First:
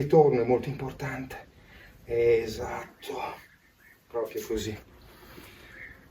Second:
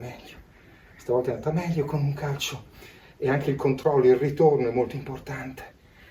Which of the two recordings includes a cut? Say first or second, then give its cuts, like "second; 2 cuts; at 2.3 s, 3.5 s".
first; 1 cut; at 4.9 s